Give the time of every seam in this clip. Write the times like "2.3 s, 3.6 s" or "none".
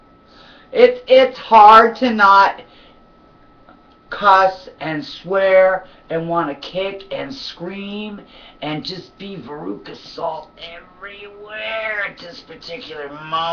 8.8 s